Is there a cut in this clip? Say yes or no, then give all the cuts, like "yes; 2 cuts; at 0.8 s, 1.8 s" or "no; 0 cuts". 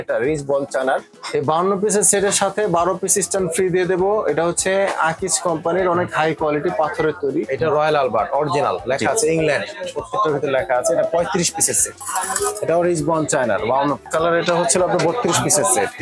yes; 4 cuts; at 1.1 s, 7.5 s, 12.0 s, 14.1 s